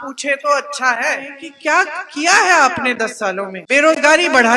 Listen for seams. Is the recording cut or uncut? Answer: cut